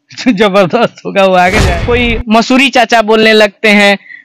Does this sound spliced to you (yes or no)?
yes